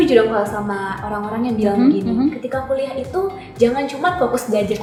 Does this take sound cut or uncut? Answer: uncut